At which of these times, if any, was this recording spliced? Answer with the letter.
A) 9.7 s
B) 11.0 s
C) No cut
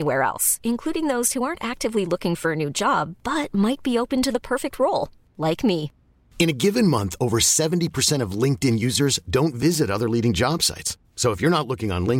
C